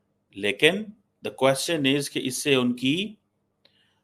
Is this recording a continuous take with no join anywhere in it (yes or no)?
yes